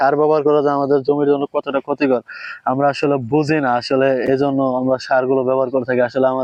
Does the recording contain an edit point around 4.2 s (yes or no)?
no